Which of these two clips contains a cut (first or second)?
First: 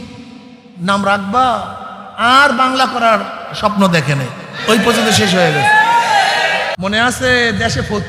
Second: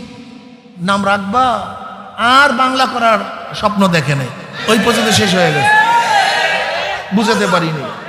first